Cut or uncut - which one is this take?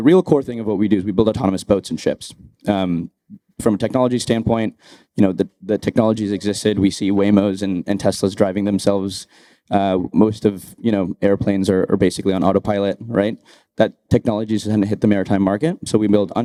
uncut